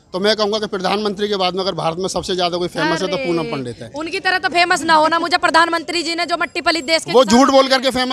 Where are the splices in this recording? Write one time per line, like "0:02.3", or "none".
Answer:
none